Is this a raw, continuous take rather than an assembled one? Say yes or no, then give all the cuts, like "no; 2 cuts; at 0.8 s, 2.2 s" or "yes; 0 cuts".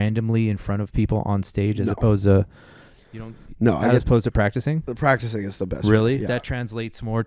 yes; 0 cuts